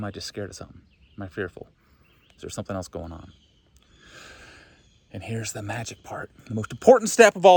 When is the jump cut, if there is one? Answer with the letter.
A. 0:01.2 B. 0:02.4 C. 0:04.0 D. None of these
D